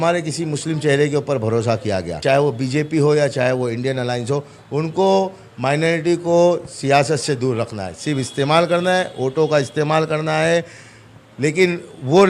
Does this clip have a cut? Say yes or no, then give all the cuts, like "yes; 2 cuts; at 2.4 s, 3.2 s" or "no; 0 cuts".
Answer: yes; 1 cut; at 2.1 s